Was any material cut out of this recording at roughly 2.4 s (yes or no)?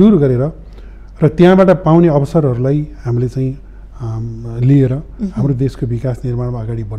no